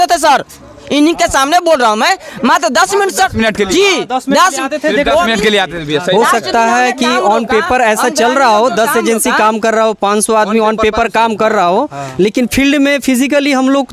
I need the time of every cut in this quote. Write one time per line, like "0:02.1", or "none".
none